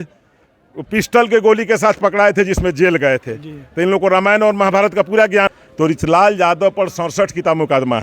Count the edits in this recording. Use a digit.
1